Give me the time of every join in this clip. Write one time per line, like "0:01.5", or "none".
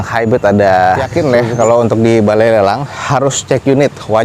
0:01.0